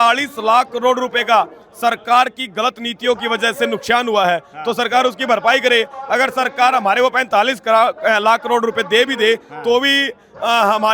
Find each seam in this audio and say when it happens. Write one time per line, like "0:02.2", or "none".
none

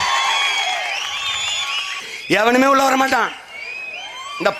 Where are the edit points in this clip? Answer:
0:02.1

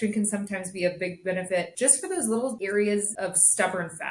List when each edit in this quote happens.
0:01.7
0:02.6
0:03.1

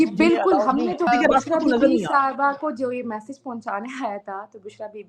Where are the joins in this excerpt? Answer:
0:01.1

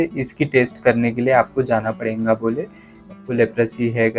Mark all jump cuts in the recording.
0:03.2

